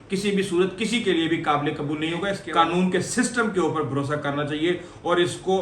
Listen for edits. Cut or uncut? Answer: cut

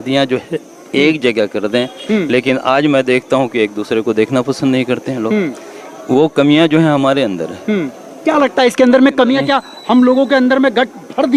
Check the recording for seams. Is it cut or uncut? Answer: uncut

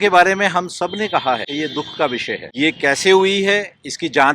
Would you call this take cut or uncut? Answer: cut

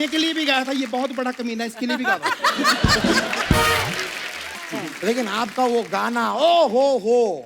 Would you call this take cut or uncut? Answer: cut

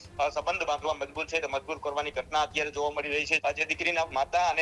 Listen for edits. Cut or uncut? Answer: cut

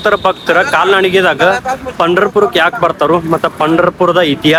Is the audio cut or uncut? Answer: uncut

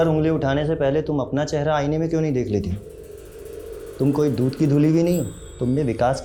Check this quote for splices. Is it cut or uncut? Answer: uncut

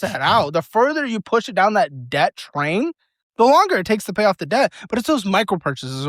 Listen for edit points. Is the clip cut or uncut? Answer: uncut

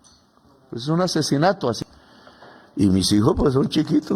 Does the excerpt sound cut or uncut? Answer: cut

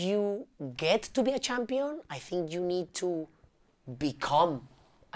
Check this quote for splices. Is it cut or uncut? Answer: uncut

